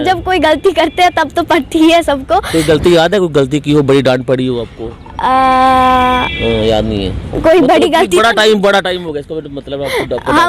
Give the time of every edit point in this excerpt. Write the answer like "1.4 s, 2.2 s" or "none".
none